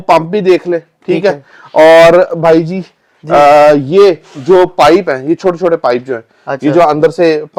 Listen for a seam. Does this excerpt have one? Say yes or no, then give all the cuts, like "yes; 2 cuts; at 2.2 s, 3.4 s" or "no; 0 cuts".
no; 0 cuts